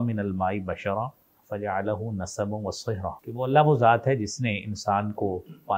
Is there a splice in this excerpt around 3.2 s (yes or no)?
yes